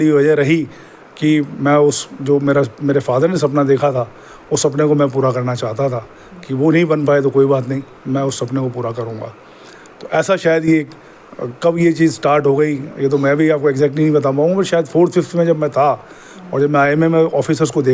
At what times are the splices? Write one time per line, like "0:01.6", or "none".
none